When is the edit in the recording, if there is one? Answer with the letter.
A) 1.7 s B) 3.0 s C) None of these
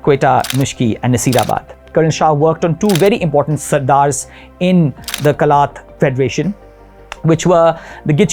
A